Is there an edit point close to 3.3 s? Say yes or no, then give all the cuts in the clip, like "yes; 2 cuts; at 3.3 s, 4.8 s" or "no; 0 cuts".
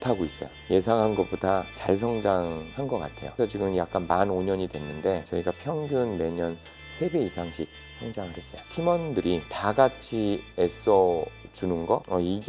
yes; 1 cut; at 3.3 s